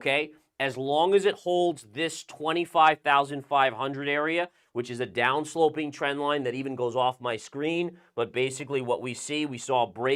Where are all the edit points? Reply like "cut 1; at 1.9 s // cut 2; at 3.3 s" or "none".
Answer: none

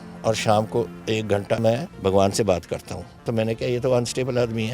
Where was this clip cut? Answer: cut 1; at 1.6 s // cut 2; at 3.3 s

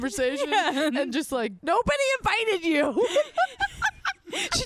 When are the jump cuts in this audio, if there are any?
cut 1; at 1.5 s

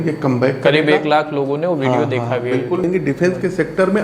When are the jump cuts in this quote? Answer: cut 1; at 2.8 s

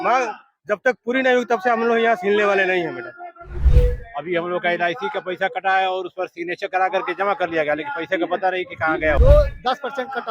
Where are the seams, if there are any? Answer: cut 1; at 3.6 s // cut 2; at 9.2 s

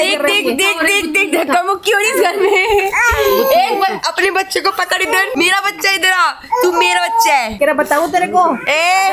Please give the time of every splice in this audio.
none

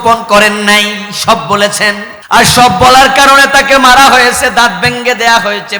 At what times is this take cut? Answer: cut 1; at 2.1 s

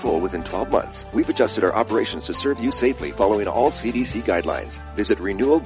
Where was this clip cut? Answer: cut 1; at 1.0 s

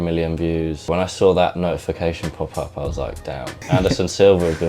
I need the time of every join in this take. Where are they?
cut 1; at 0.9 s // cut 2; at 3.6 s

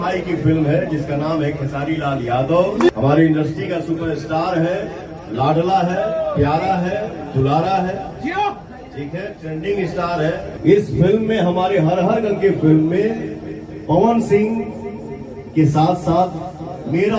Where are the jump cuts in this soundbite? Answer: cut 1; at 2.9 s // cut 2; at 10.5 s

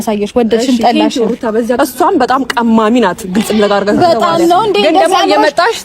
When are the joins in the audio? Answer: cut 1; at 1.8 s

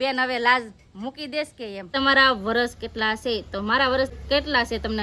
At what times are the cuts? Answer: cut 1; at 1.9 s // cut 2; at 4.1 s

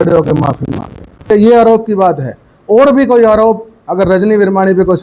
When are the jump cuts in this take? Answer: cut 1; at 1.3 s

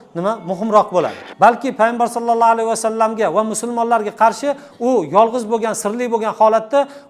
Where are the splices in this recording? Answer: cut 1; at 1.2 s

